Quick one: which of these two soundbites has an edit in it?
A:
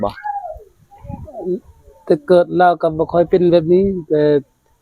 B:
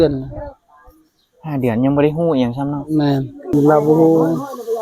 B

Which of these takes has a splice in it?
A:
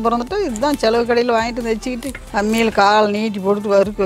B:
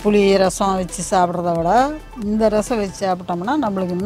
A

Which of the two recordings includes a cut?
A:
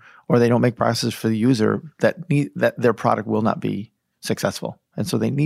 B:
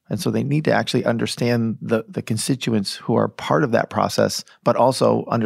B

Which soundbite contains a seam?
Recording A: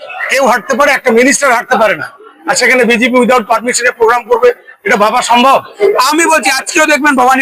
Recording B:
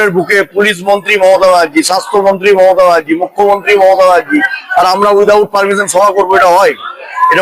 A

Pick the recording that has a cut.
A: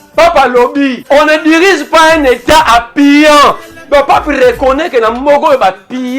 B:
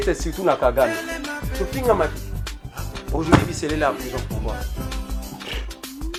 A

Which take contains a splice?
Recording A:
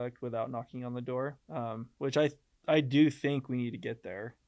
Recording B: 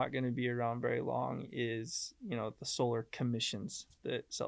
A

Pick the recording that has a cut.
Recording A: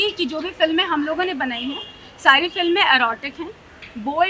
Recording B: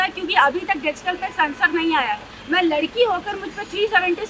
B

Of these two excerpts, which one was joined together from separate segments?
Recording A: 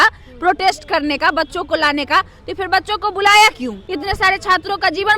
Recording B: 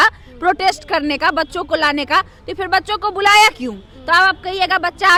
A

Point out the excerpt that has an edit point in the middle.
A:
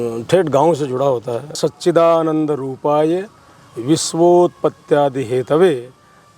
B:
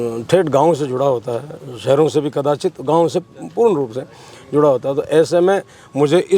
A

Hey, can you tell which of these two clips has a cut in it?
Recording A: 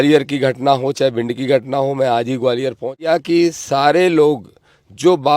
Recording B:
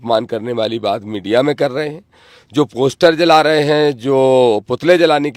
A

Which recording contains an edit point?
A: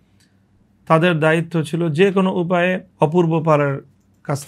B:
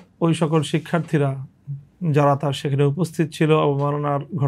A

